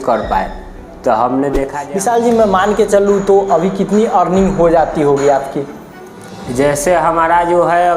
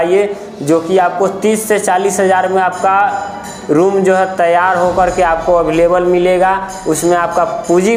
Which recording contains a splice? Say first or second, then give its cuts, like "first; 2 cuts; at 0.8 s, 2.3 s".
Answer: first; 1 cut; at 1.8 s